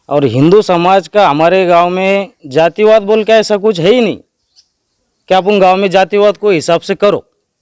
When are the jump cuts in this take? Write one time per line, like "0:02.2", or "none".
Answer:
none